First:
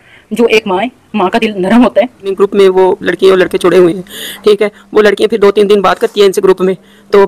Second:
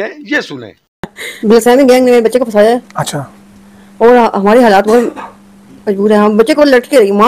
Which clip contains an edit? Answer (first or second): first